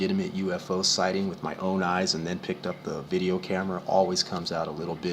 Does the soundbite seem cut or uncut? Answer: cut